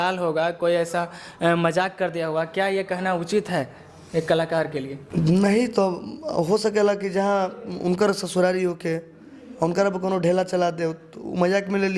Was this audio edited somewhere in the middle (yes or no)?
yes